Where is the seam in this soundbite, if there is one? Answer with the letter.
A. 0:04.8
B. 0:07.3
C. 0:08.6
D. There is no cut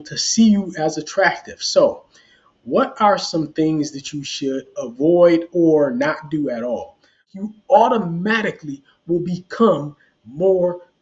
B